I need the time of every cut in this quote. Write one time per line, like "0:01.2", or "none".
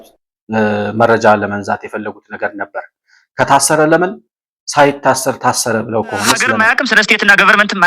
0:06.5

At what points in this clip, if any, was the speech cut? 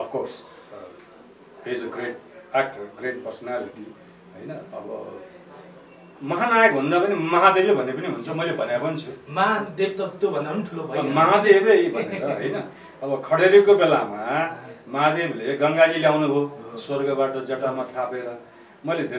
none

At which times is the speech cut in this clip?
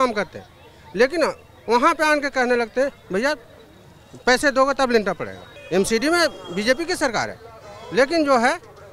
0:05.4

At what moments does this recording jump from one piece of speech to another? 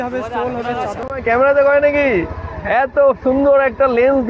0:01.0

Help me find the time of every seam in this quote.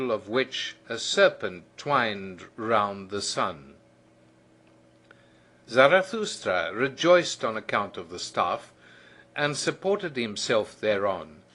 0:06.4

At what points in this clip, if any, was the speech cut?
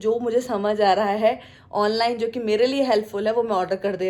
none

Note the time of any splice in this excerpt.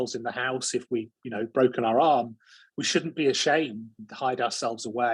none

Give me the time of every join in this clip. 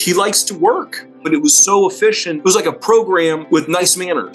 0:01.2
0:02.3
0:03.4

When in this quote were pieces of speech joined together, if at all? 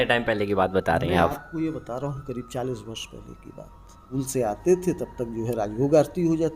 0:04.0

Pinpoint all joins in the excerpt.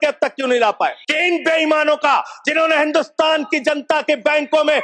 0:01.1

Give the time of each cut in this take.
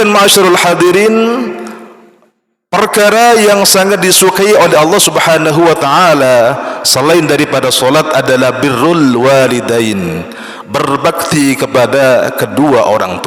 none

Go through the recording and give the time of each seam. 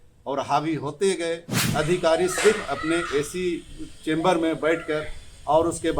0:01.6

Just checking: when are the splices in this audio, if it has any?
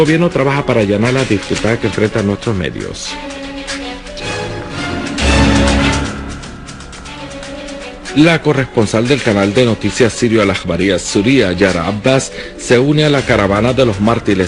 none

